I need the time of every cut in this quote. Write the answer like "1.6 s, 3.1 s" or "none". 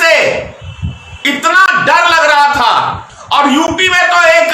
3.1 s